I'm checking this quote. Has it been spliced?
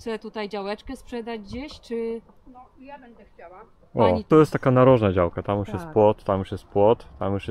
yes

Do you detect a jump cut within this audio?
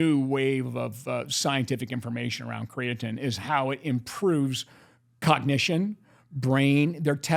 no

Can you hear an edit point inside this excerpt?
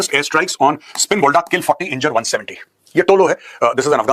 no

